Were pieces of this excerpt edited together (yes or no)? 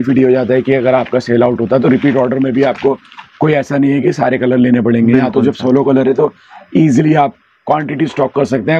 no